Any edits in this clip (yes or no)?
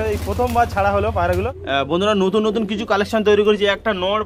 yes